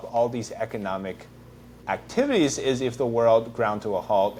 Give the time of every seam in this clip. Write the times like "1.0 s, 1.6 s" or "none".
none